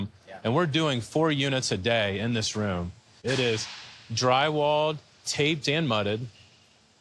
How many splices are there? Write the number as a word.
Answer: one